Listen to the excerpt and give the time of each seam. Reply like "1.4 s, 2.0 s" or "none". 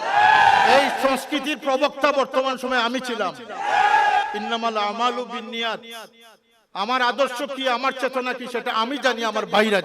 4.3 s